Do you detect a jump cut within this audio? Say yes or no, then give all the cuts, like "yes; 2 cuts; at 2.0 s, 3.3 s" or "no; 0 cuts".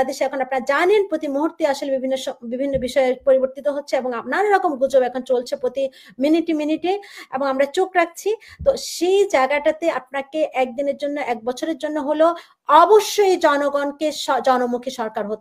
no; 0 cuts